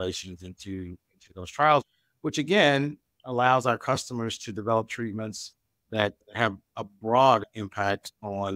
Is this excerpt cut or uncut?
cut